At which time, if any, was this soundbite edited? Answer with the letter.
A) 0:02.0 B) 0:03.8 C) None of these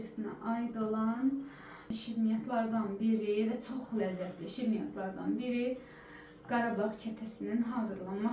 A